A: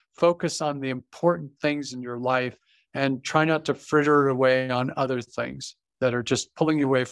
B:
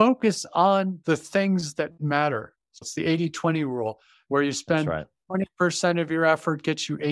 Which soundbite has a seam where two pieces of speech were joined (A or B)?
B